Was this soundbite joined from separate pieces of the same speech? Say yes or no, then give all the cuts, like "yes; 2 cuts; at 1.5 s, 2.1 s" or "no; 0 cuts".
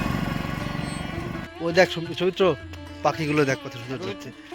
yes; 1 cut; at 1.5 s